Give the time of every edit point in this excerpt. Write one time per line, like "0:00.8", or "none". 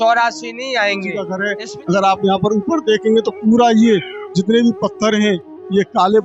0:01.4

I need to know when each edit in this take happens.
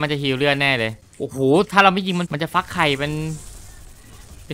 0:01.0
0:02.3

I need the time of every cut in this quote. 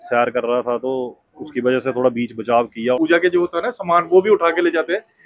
0:02.9

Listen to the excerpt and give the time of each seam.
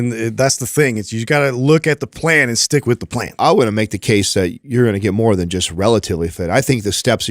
0:03.3

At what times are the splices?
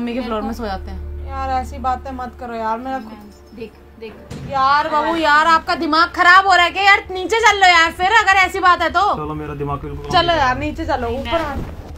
0:01.0
0:04.3

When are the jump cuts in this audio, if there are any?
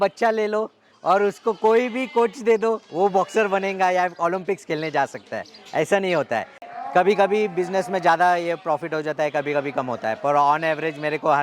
0:06.6

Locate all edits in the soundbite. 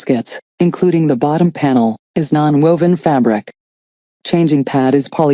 0:01.7

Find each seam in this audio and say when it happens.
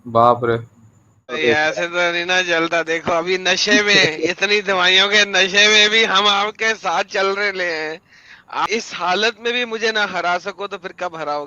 0:01.4
0:08.7

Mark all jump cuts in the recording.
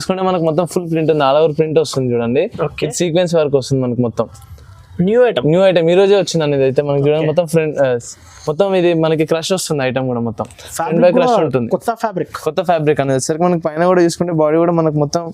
none

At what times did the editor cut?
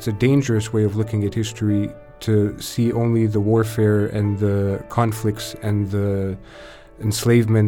none

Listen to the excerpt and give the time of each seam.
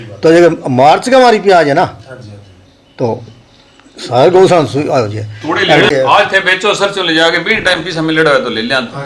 0:05.9

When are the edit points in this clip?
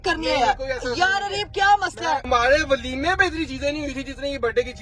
0:02.2

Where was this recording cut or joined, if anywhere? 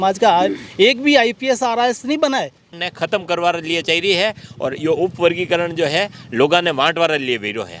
0:02.7

